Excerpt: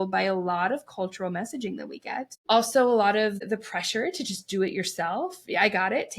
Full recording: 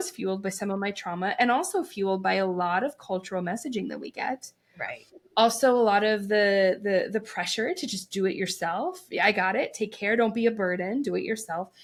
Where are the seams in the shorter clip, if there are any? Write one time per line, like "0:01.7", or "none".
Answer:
0:02.3
0:03.4